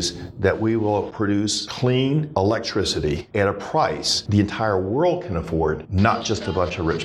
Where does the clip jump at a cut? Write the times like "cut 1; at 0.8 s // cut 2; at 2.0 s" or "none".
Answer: none